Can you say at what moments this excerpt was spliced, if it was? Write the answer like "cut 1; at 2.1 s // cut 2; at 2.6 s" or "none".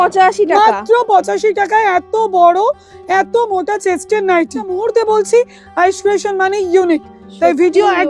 cut 1; at 4.7 s